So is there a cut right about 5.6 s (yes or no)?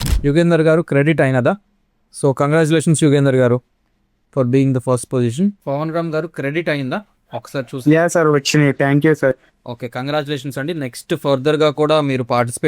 yes